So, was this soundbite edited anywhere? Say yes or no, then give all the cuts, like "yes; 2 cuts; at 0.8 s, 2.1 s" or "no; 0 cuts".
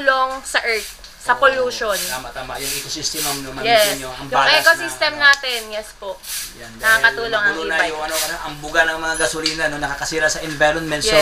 no; 0 cuts